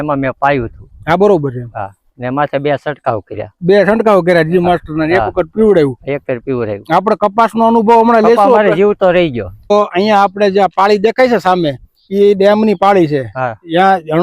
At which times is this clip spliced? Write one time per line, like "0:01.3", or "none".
0:09.7